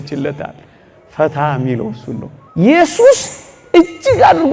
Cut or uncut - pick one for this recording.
cut